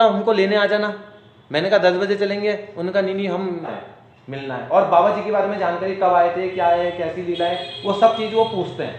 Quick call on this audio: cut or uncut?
cut